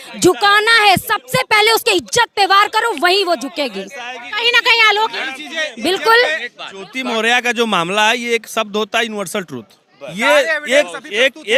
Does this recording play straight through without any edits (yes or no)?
yes